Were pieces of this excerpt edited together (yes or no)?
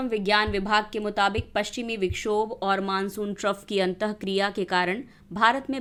no